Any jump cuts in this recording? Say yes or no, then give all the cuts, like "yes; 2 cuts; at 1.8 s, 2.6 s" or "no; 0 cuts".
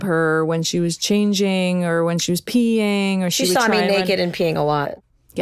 no; 0 cuts